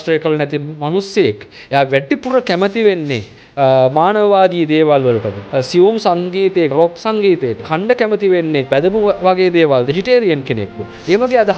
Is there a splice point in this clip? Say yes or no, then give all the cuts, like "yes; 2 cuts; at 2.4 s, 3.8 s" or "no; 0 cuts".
yes; 5 cuts; at 5.4 s, 6.7 s, 7.7 s, 8.7 s, 9.9 s